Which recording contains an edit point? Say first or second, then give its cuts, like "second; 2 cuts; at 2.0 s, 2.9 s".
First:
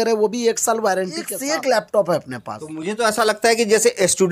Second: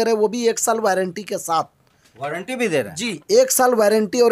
first; 1 cut; at 1.3 s